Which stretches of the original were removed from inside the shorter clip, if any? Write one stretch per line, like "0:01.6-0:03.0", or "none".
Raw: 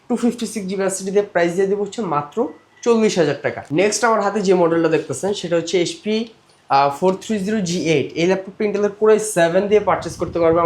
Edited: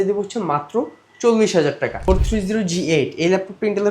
0:03.7-0:07.0